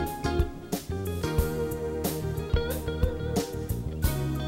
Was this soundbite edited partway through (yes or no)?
no